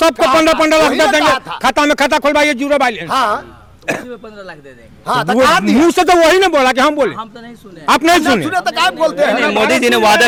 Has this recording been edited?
no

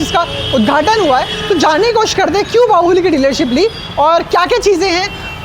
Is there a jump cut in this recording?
no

